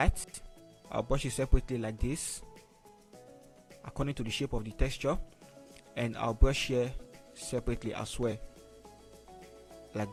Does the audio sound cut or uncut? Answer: uncut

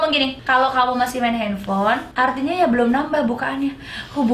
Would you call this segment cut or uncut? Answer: cut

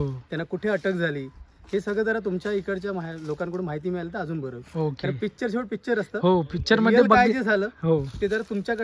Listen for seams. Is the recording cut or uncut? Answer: uncut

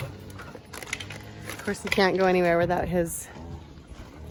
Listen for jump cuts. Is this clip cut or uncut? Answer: uncut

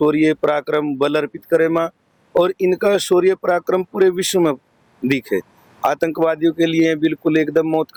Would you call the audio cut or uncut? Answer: uncut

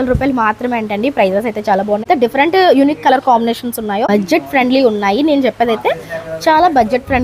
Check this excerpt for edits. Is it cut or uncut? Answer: cut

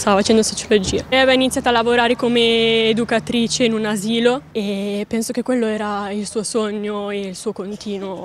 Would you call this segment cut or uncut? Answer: uncut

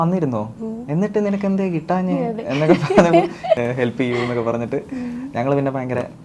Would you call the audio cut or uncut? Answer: cut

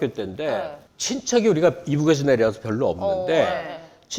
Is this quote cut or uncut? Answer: uncut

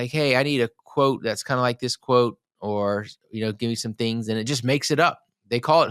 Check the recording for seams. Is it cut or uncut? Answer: uncut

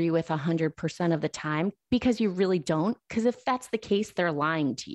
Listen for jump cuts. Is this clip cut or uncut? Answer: uncut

